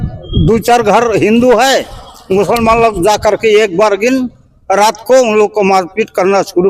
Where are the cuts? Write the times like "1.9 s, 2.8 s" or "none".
none